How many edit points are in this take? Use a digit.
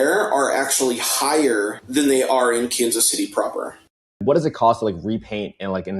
2